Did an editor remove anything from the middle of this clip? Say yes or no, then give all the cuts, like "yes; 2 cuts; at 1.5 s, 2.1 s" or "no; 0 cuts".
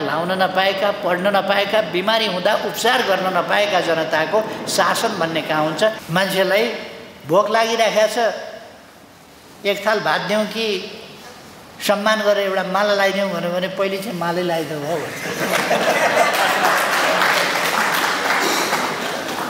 yes; 1 cut; at 6.0 s